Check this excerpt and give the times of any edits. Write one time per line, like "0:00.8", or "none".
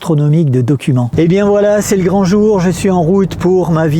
0:01.1